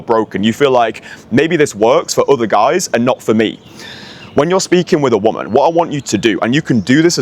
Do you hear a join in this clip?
no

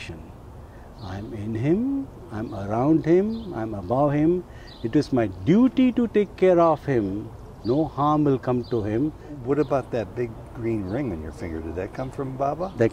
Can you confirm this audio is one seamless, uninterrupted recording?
no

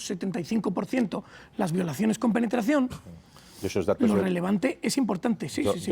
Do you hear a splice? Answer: no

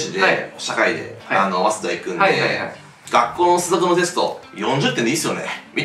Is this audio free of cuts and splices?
yes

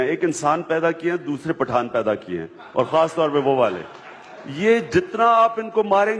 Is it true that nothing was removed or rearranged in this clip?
yes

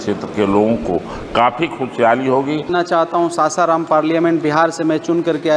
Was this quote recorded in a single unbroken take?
no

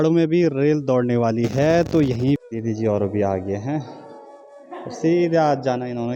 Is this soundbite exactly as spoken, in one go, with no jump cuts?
no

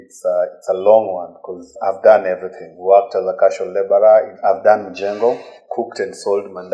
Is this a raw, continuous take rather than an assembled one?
no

